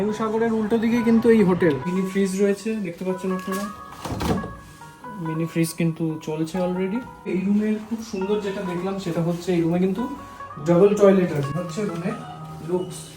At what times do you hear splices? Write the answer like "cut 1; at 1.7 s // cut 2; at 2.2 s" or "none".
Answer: cut 1; at 1.9 s // cut 2; at 7.3 s // cut 3; at 11.5 s